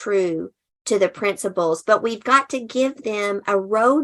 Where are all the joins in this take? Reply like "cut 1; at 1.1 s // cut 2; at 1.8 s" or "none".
none